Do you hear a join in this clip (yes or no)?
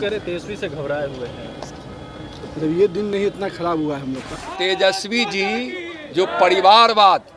yes